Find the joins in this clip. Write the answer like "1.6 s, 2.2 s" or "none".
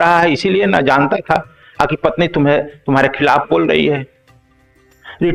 none